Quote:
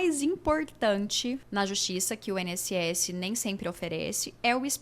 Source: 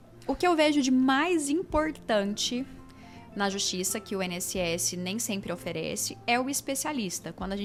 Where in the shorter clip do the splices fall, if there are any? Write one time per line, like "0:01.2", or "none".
0:01.4